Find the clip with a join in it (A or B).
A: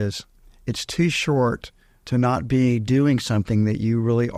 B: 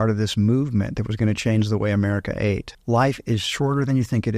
B